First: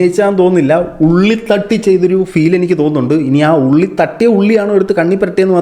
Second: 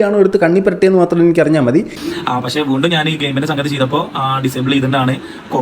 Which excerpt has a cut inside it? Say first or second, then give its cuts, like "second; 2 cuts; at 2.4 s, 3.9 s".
second; 1 cut; at 2.0 s